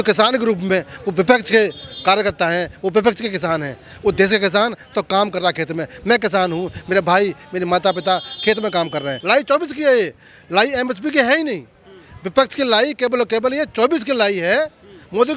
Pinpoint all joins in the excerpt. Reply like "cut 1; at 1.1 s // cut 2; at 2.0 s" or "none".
cut 1; at 9.1 s